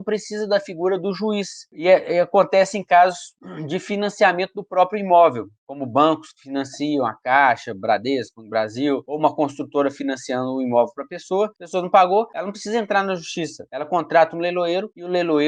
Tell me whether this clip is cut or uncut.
uncut